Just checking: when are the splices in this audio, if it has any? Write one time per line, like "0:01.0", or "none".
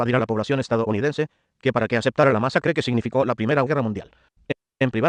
none